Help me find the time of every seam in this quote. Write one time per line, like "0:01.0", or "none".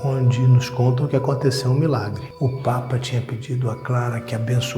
0:02.2